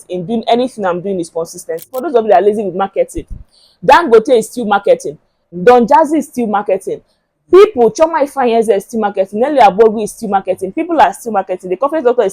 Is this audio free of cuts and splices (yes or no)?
no